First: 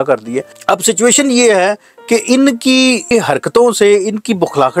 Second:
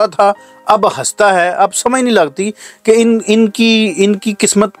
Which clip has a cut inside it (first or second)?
first